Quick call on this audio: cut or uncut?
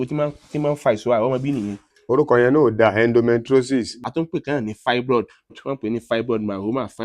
cut